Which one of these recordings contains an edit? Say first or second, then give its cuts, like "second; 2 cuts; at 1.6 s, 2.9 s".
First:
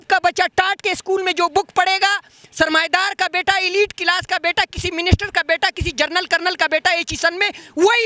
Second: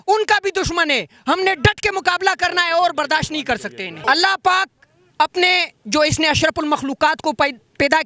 second; 1 cut; at 3.9 s